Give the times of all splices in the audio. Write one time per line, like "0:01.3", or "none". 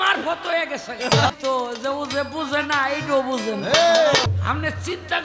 0:01.3
0:04.3